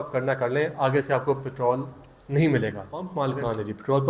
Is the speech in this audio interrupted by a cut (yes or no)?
yes